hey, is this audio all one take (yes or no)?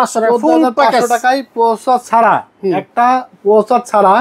yes